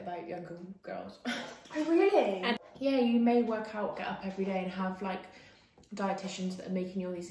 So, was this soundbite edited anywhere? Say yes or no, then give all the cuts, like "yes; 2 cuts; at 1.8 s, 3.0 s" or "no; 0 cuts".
yes; 1 cut; at 2.7 s